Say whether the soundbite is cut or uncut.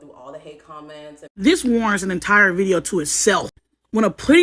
cut